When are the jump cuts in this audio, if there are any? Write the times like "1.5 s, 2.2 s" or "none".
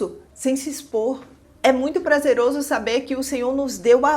1.4 s